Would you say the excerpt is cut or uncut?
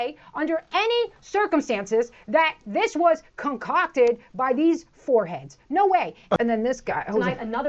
cut